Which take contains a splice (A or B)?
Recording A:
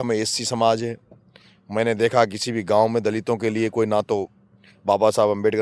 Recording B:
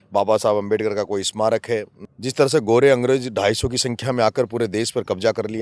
B